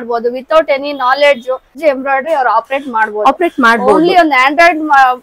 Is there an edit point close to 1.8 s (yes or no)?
yes